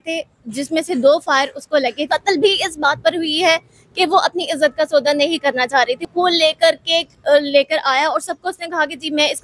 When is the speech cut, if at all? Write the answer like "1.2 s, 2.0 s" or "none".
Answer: 2.0 s, 6.1 s